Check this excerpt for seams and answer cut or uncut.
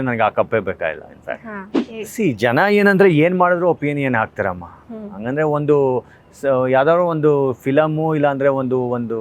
cut